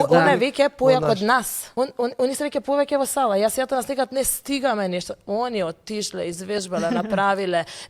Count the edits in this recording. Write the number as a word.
one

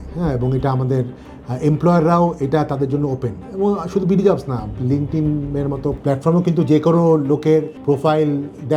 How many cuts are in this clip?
two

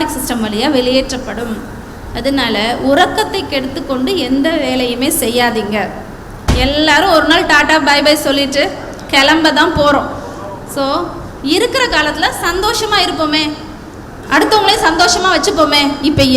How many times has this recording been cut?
one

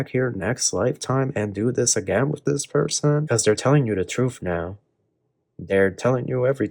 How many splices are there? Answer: one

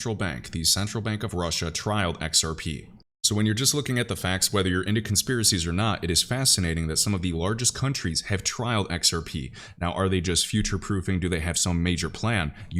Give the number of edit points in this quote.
zero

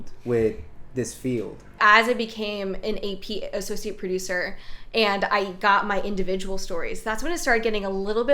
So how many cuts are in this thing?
one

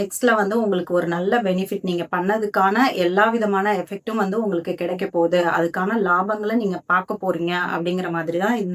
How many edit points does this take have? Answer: zero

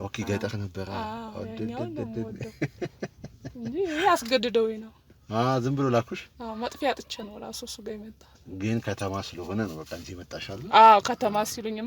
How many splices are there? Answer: zero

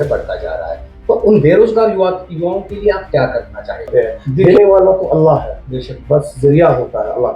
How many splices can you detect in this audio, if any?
one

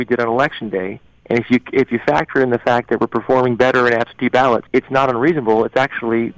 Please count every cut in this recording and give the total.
one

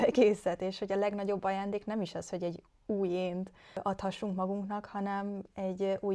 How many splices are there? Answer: one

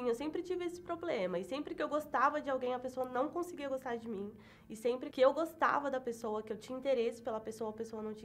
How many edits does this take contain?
one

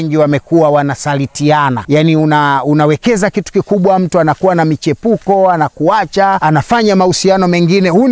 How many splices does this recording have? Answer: two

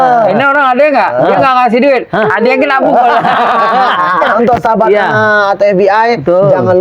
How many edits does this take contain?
one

